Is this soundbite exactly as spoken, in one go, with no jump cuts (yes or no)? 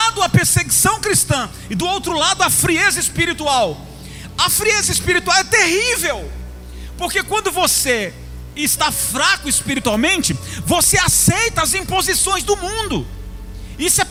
yes